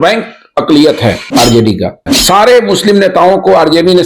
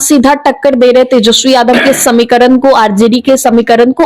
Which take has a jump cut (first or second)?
first